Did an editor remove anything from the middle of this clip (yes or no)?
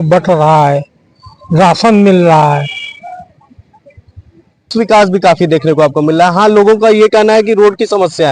yes